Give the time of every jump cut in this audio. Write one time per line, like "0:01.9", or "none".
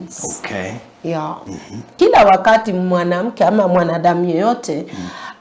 0:01.9